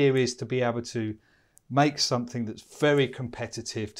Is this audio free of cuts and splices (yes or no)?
yes